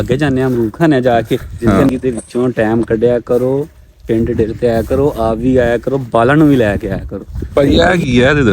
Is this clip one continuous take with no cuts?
no; 2 cuts; at 1.9 s, 7.3 s

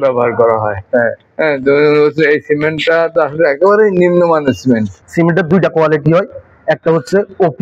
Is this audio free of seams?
yes; 0 cuts

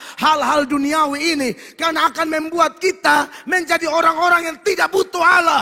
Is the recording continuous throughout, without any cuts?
yes; 0 cuts

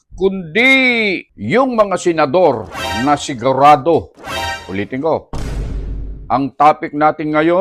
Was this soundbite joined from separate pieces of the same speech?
yes; 1 cut; at 1.3 s

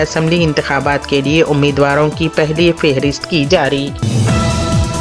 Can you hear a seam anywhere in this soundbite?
yes; 1 cut; at 4.1 s

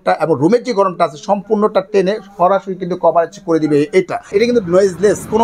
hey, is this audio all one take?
no; 1 cut; at 4.3 s

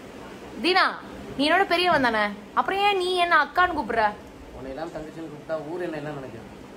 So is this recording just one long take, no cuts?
no; 1 cut; at 3.1 s

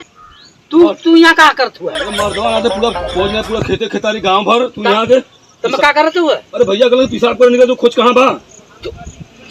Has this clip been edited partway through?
no; 0 cuts

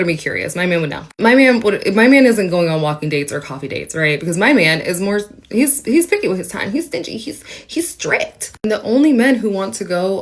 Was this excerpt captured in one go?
no; 1 cut; at 1.3 s

